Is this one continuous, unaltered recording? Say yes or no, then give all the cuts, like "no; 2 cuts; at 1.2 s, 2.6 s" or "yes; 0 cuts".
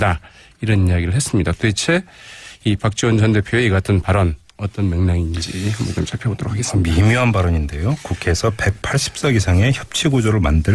yes; 0 cuts